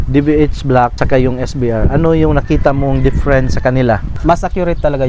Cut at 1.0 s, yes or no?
yes